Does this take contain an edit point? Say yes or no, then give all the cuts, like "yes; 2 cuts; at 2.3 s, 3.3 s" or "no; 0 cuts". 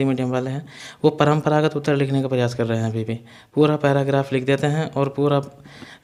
no; 0 cuts